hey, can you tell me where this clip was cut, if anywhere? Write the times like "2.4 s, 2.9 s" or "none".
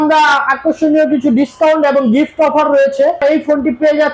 3.2 s